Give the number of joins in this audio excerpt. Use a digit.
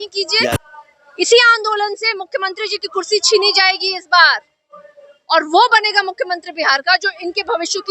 0